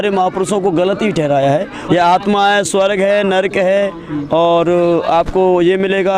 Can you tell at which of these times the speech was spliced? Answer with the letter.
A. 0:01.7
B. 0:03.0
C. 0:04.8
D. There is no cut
A